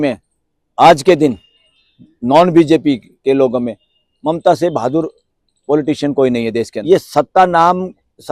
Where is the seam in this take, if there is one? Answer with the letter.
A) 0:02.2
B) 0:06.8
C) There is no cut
B